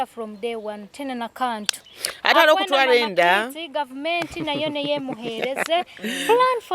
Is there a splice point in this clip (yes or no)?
yes